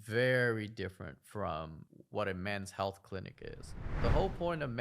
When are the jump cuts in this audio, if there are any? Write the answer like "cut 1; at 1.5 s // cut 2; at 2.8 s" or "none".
cut 1; at 3.9 s

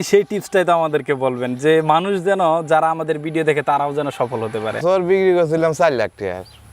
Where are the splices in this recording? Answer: cut 1; at 4.8 s

